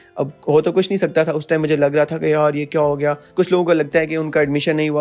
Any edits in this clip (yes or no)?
yes